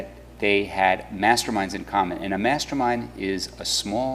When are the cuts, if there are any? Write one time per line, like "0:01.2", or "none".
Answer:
0:02.8